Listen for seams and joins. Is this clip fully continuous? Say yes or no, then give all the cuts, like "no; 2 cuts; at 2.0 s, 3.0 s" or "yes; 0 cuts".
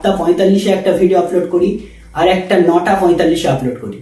yes; 0 cuts